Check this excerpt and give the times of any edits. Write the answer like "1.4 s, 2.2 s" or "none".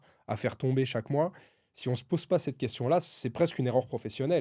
none